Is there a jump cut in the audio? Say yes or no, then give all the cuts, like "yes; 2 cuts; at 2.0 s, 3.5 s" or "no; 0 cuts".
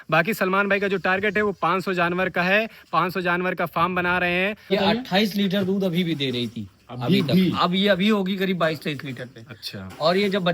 yes; 1 cut; at 4.7 s